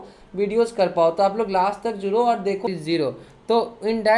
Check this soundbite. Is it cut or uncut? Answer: cut